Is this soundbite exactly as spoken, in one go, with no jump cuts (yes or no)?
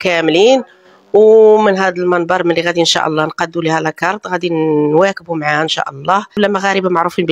no